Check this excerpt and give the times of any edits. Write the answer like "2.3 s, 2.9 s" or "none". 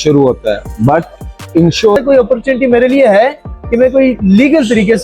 2.0 s

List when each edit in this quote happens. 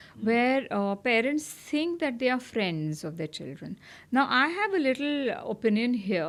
none

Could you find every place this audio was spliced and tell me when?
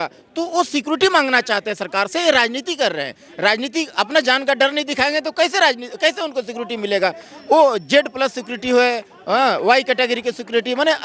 none

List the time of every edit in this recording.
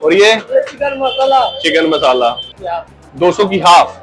2.5 s

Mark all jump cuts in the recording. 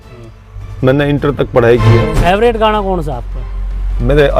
2.1 s

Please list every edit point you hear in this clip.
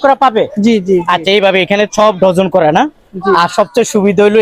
none

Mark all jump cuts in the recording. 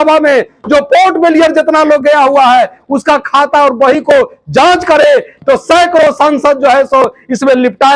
none

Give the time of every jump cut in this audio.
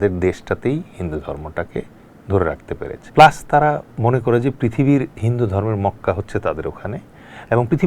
3.0 s

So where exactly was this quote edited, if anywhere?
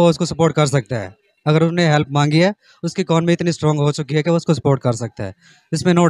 none

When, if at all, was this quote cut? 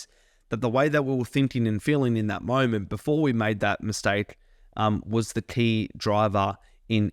none

